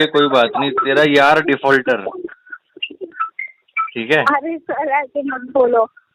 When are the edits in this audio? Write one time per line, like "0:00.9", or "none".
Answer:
none